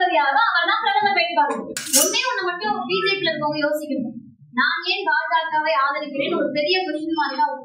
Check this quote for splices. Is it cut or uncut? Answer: cut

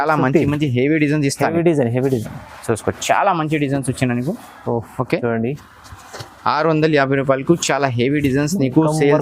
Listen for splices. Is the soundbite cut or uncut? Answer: uncut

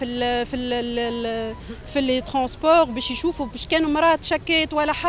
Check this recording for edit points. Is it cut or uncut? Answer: uncut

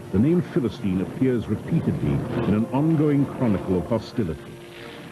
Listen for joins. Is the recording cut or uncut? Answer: uncut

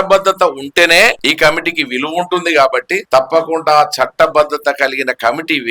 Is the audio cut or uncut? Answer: cut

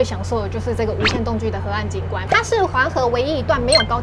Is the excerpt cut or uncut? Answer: uncut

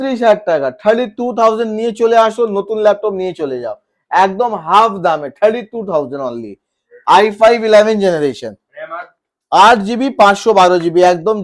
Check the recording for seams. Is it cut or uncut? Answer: uncut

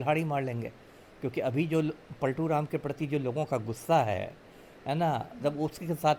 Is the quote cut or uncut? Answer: uncut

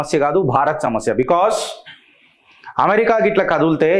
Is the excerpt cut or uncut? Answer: uncut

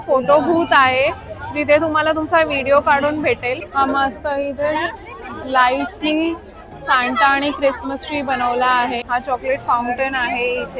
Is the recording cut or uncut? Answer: cut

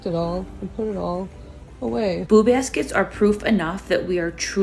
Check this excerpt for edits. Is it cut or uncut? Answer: cut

